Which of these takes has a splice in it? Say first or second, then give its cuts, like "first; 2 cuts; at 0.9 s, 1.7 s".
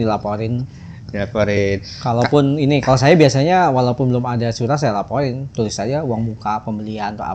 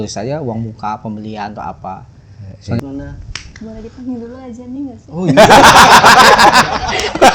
second; 1 cut; at 2.8 s